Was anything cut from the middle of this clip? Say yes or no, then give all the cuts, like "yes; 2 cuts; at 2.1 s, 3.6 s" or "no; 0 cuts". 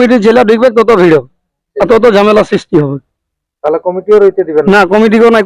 no; 0 cuts